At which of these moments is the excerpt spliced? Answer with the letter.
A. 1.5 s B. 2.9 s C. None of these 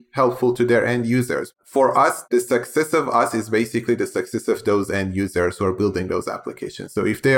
A